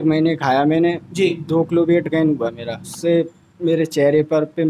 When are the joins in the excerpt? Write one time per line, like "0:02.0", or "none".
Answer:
0:02.8